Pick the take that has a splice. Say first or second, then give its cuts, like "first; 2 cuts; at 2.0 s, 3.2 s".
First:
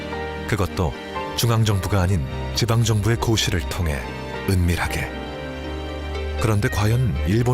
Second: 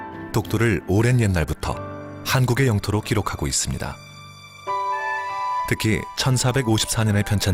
first; 1 cut; at 1.0 s